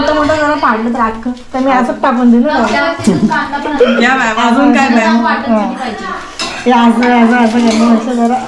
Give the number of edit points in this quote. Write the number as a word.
zero